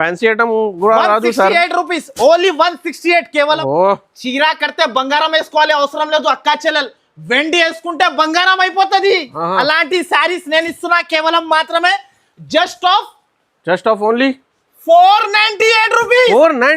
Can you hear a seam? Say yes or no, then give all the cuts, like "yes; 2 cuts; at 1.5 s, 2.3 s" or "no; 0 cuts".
yes; 1 cut; at 3.6 s